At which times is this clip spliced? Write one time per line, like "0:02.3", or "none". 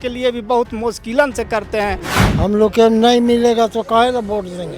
0:02.1